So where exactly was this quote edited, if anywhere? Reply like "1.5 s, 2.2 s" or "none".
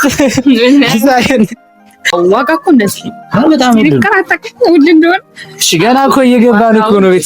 2.1 s